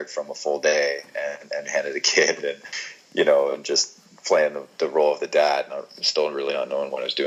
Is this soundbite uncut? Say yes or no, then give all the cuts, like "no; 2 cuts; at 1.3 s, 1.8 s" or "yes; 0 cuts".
yes; 0 cuts